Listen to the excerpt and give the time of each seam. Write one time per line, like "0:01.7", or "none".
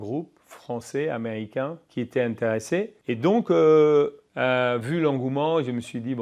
0:01.8
0:03.0
0:04.2

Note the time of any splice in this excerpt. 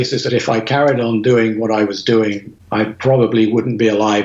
0:02.5

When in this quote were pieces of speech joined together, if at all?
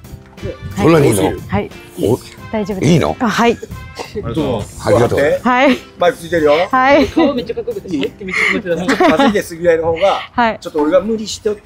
none

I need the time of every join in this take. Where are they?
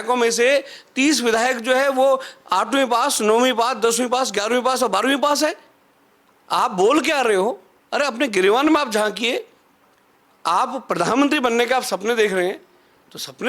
none

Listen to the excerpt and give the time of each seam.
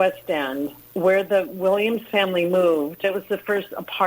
0:03.0

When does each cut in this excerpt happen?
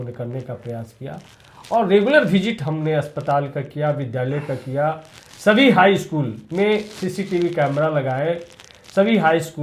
none

